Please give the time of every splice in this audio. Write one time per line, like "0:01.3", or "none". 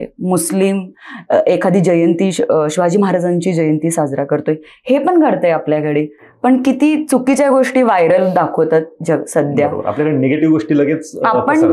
none